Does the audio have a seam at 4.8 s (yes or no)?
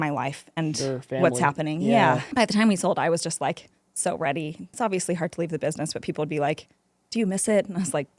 yes